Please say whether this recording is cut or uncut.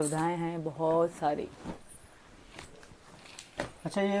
uncut